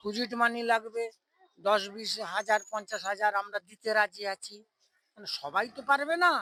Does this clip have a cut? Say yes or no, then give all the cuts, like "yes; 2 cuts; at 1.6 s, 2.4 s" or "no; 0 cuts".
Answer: no; 0 cuts